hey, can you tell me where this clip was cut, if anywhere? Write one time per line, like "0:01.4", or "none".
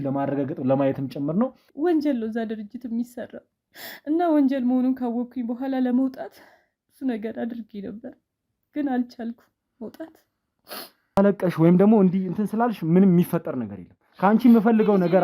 0:01.6
0:11.2